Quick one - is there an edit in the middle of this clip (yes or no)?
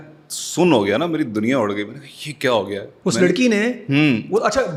no